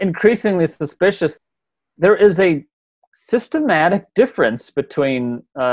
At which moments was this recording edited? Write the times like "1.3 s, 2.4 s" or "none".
1.3 s